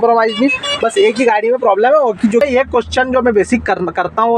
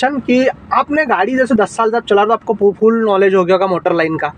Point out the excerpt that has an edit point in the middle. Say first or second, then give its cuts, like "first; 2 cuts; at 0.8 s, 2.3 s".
first; 1 cut; at 2.4 s